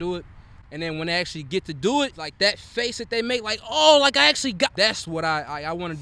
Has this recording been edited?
yes; 2 cuts; at 2.2 s, 4.7 s

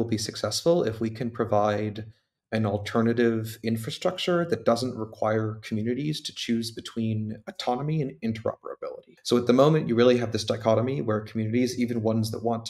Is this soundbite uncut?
no; 1 cut; at 9.1 s

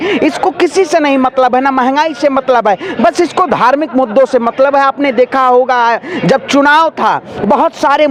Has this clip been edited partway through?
no; 0 cuts

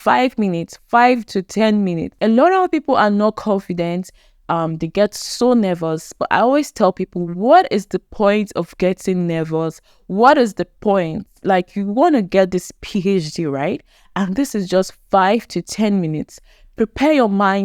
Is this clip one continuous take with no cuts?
no; 1 cut; at 2.1 s

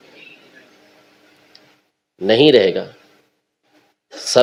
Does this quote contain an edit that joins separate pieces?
no; 0 cuts

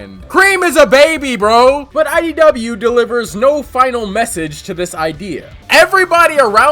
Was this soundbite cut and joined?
yes; 2 cuts; at 1.8 s, 5.6 s

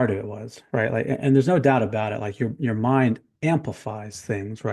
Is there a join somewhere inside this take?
no; 0 cuts

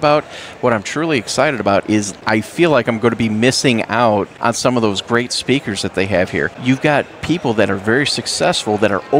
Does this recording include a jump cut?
yes; 3 cuts; at 2.2 s, 4.3 s, 6.5 s

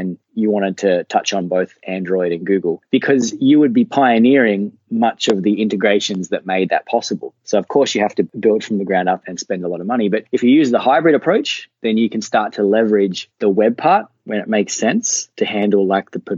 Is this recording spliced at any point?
no; 0 cuts

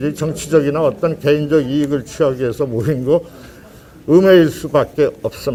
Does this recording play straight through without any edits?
yes; 0 cuts

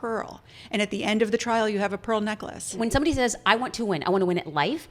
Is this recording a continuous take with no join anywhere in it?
no; 1 cut; at 2.7 s

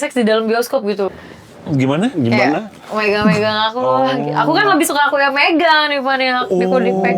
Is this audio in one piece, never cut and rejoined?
no; 1 cut; at 1.1 s

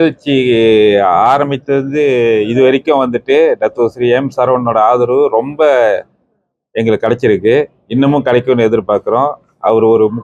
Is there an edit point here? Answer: no; 0 cuts

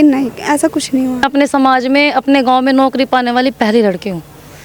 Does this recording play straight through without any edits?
no; 1 cut; at 1.3 s

